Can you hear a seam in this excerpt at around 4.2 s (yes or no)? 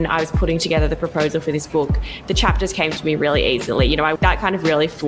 yes